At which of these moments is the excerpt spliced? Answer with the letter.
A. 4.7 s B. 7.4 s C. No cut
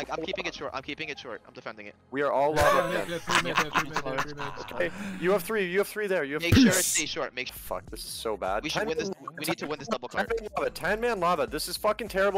B